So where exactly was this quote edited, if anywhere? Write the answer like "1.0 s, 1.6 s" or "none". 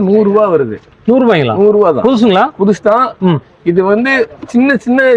none